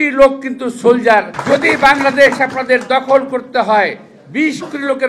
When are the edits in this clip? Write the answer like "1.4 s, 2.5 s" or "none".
1.3 s